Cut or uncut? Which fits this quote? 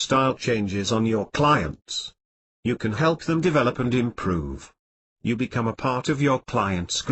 cut